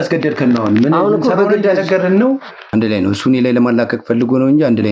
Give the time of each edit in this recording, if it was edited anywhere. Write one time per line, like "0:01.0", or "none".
0:02.5